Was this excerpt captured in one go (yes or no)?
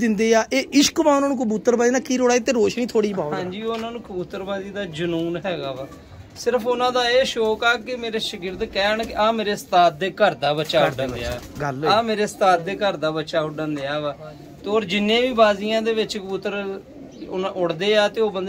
yes